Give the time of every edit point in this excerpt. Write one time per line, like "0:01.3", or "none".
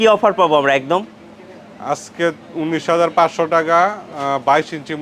none